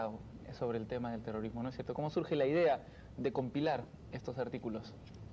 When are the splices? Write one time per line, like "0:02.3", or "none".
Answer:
none